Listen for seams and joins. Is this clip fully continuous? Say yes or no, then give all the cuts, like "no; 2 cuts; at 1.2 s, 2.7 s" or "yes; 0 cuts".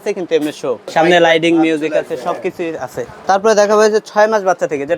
no; 2 cuts; at 0.9 s, 3.1 s